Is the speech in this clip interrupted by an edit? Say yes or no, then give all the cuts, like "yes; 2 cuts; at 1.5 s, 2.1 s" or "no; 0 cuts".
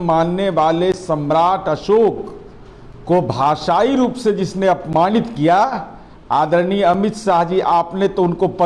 no; 0 cuts